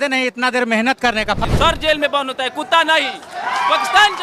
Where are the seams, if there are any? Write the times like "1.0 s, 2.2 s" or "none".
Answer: 1.4 s